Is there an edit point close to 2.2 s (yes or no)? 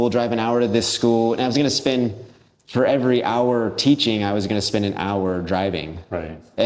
no